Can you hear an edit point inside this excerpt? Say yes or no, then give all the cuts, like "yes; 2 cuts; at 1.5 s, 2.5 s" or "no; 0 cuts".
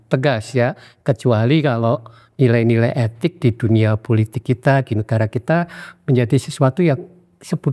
no; 0 cuts